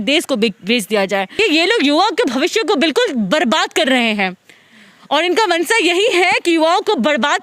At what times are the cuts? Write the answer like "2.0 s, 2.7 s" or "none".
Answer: 1.4 s